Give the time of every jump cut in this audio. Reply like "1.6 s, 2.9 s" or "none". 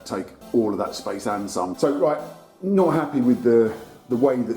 1.7 s

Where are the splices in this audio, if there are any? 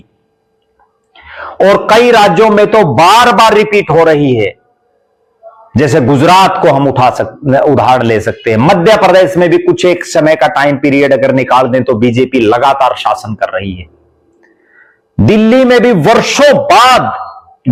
none

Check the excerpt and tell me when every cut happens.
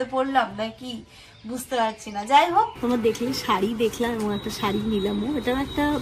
2.9 s

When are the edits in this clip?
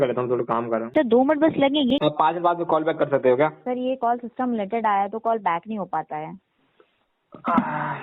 0.9 s, 2.0 s, 3.6 s

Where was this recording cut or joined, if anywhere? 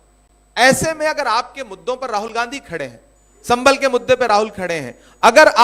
none

